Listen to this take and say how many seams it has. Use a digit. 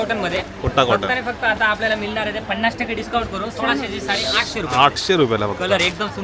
0